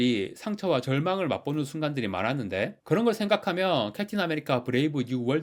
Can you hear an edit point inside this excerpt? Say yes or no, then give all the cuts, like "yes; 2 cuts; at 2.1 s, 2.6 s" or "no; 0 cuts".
no; 0 cuts